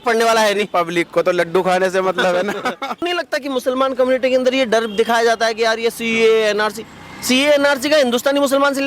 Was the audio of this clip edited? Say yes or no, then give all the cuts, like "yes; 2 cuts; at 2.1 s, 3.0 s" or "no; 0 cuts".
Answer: yes; 1 cut; at 3.1 s